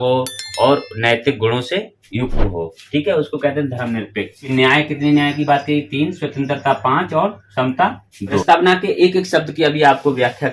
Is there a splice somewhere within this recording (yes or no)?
yes